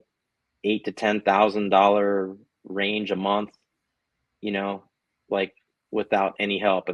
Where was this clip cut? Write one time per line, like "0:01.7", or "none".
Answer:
none